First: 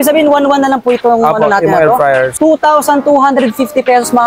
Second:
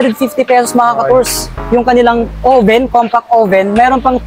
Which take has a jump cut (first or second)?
first